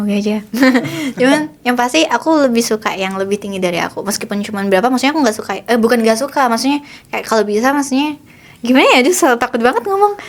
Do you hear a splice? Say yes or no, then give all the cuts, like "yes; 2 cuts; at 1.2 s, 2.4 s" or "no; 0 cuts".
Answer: no; 0 cuts